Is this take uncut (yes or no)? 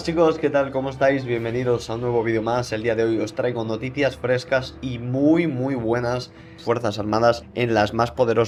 yes